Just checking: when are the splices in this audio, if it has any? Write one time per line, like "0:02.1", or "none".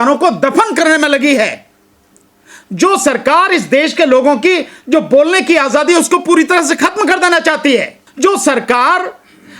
0:08.0

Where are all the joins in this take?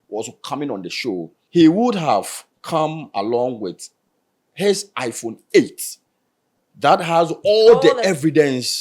0:01.4

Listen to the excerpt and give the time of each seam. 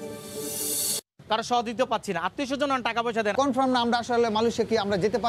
0:00.9
0:03.3

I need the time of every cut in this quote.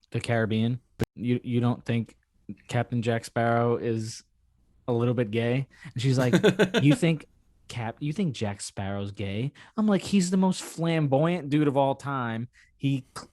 none

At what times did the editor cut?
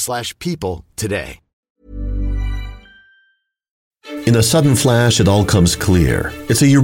0:01.7
0:04.0

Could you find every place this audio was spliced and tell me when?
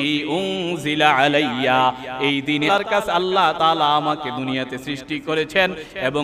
0:02.7

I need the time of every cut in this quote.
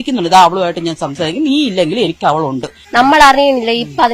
0:02.7

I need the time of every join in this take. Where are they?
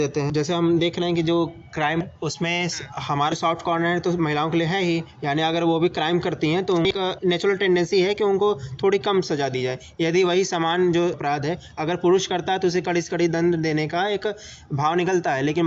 none

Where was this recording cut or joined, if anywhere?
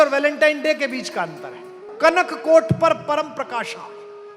0:01.8

